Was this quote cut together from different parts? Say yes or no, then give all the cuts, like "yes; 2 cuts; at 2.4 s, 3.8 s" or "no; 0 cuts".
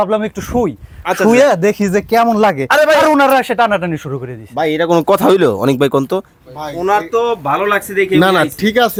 no; 0 cuts